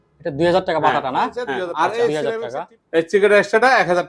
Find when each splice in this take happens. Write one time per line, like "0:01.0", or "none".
0:02.1